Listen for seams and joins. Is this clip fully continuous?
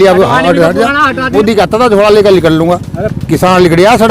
no; 1 cut; at 1.2 s

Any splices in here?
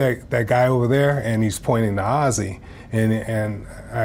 no; 0 cuts

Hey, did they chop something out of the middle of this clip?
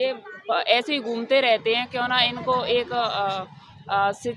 no; 0 cuts

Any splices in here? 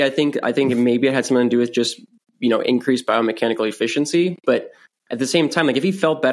no; 0 cuts

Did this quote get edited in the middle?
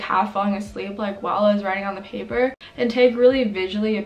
yes; 1 cut; at 2.6 s

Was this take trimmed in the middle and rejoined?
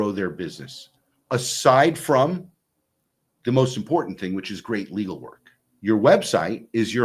yes; 1 cut; at 5.7 s

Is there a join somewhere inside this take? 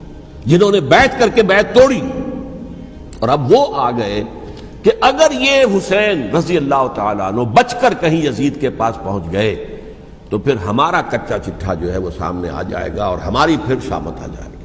no; 0 cuts

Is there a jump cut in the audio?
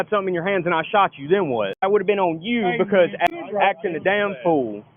yes; 2 cuts; at 1.8 s, 3.3 s

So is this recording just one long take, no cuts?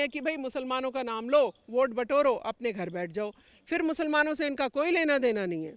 yes; 0 cuts

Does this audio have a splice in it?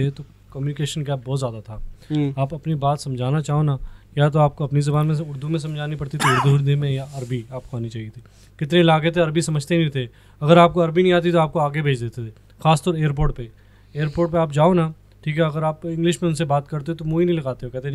no; 0 cuts

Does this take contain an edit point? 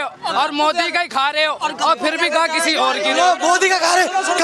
no; 0 cuts

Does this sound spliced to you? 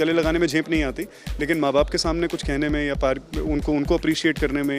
no; 0 cuts

